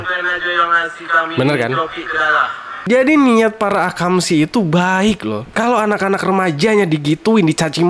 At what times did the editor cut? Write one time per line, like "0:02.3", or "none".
0:02.7